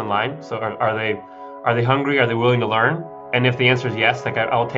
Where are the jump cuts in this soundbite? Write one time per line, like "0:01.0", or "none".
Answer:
none